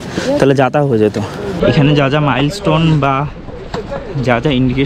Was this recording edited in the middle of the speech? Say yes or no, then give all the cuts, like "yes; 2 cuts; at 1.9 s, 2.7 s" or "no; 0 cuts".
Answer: yes; 1 cut; at 1.5 s